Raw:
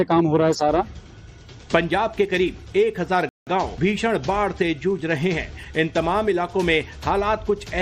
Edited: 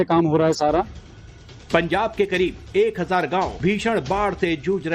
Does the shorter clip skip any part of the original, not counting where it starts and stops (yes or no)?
yes